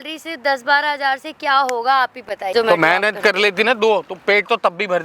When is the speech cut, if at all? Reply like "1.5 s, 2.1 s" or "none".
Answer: 2.5 s